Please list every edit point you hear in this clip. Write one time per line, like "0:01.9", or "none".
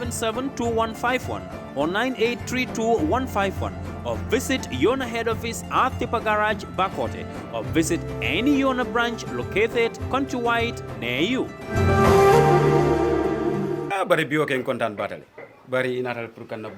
0:13.9